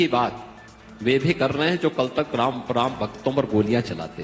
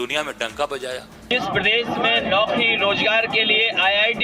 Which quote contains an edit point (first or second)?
second